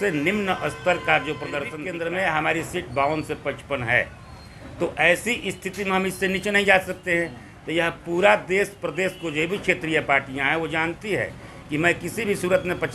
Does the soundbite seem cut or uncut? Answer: cut